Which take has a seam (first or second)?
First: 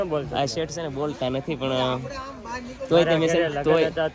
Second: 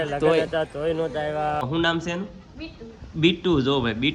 second